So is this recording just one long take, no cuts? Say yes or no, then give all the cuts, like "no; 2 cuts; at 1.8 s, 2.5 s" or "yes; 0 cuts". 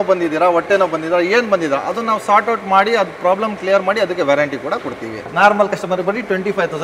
no; 1 cut; at 5.2 s